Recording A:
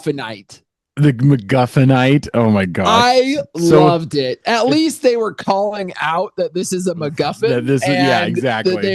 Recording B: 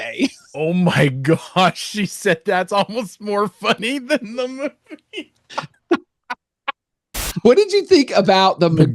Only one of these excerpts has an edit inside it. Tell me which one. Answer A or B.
B